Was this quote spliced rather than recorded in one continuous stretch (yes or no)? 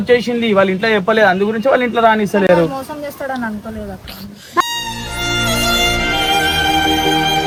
no